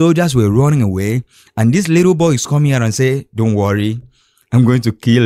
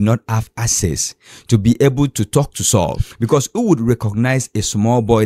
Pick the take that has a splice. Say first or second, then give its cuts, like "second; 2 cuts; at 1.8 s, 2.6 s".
second; 1 cut; at 3.1 s